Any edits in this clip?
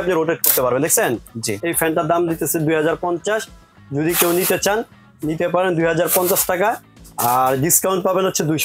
no; 0 cuts

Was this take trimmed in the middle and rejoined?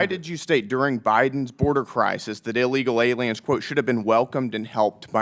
no; 0 cuts

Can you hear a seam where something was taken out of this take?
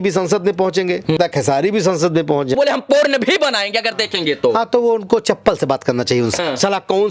yes; 3 cuts; at 1.2 s, 2.6 s, 6.3 s

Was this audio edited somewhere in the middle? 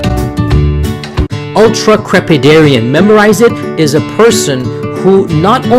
yes; 1 cut; at 1.3 s

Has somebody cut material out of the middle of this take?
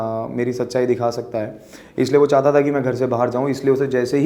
no; 0 cuts

